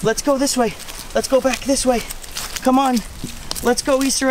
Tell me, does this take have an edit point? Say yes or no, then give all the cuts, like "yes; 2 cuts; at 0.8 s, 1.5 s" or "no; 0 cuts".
no; 0 cuts